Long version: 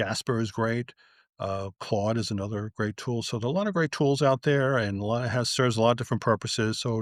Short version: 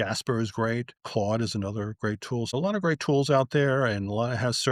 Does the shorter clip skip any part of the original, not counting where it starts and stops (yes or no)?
yes